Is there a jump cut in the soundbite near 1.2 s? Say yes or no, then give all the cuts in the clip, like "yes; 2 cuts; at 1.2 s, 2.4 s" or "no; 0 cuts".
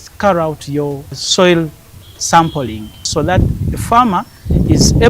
yes; 2 cuts; at 1.2 s, 3.1 s